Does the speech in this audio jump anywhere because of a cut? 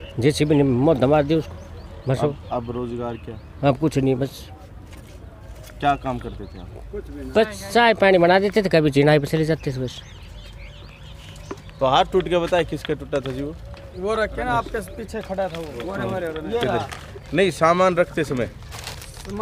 no; 0 cuts

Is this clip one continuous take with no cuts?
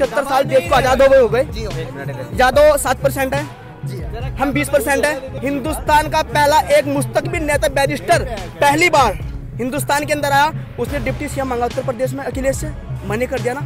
no; 1 cut; at 5.3 s

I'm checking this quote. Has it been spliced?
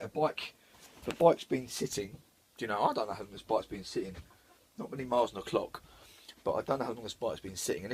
no; 0 cuts

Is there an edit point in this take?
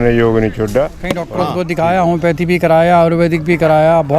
yes; 1 cut; at 1.3 s

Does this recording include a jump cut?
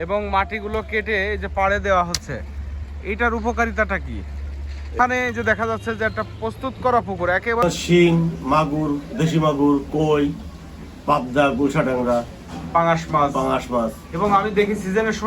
yes; 2 cuts; at 4.9 s, 7.6 s

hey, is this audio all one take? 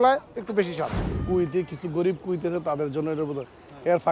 no; 1 cut; at 1.1 s

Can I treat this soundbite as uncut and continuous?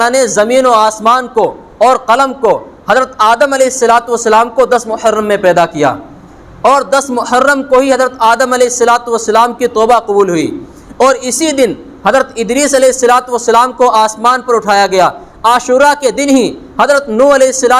no; 1 cut; at 11.9 s

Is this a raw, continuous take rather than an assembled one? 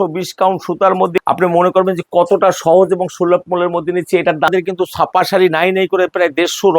no; 2 cuts; at 1.2 s, 4.5 s

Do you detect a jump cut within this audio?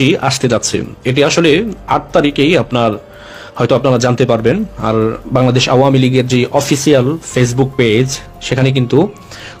no; 0 cuts

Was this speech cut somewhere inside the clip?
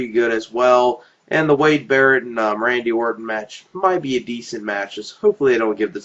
no; 0 cuts

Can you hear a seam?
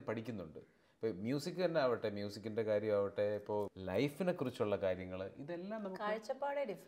yes; 1 cut; at 3.8 s

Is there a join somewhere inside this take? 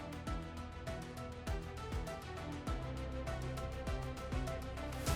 no; 0 cuts

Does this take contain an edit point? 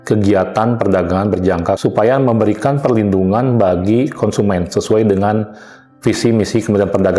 yes; 1 cut; at 1.8 s

